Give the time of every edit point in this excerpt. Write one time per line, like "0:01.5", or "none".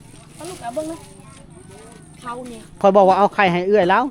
0:02.6

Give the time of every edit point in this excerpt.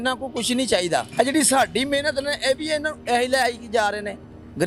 none

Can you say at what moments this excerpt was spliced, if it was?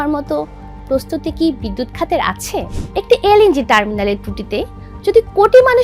0:02.8

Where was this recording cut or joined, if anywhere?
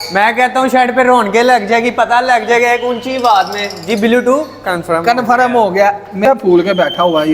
0:06.2

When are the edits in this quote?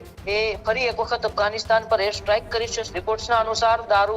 0:02.8

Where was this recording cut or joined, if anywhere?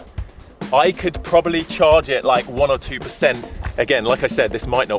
0:03.6

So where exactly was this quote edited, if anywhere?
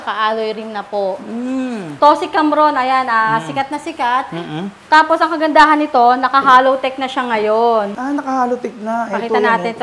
0:01.9
0:08.0

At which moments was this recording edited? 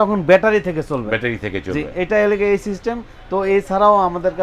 none

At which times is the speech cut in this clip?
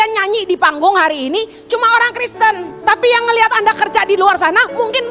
0:02.7

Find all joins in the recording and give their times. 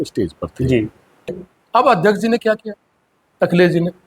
0:01.3

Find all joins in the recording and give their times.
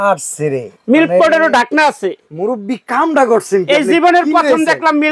none

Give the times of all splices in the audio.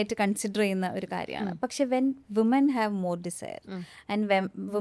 none

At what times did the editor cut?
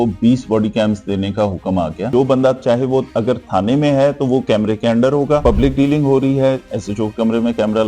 0:02.0
0:05.4

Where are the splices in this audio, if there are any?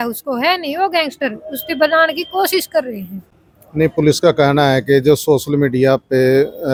none

